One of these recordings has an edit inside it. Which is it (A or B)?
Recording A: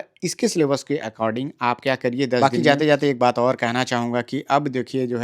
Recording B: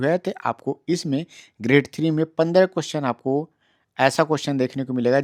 A